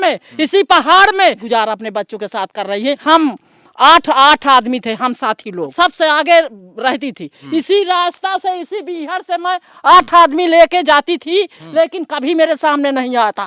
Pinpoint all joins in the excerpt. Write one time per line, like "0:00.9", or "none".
0:01.4
0:03.0
0:05.7
0:07.3